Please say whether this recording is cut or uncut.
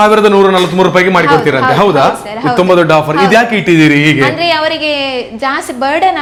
uncut